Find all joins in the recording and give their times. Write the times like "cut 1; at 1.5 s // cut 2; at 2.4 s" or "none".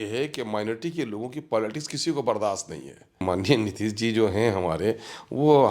cut 1; at 3.2 s

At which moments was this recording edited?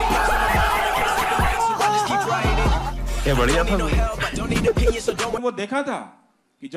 cut 1; at 5.4 s

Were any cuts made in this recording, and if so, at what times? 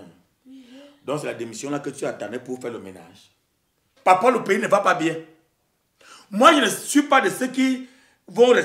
cut 1; at 3.9 s

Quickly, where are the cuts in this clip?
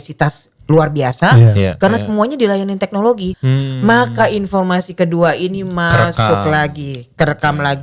cut 1; at 3.3 s

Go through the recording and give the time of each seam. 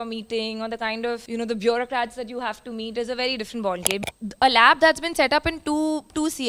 cut 1; at 1.2 s // cut 2; at 4.0 s

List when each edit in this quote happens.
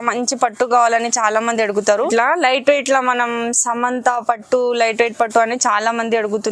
cut 1; at 2.1 s

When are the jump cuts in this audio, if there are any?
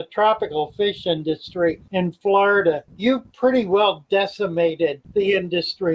cut 1; at 1.8 s // cut 2; at 2.9 s // cut 3; at 5.0 s

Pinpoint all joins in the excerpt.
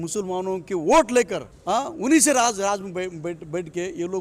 cut 1; at 1.5 s

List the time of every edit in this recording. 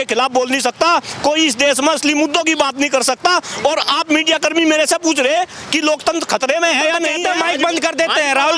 cut 1; at 7.2 s

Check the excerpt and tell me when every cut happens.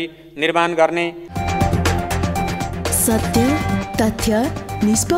cut 1; at 1.2 s

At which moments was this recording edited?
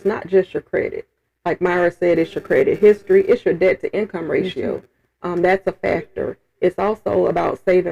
none

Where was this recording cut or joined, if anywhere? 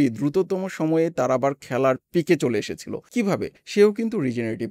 cut 1; at 3.3 s

